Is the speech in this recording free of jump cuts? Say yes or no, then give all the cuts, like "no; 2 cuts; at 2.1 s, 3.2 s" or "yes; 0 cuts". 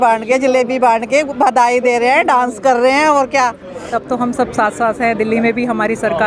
no; 1 cut; at 4.0 s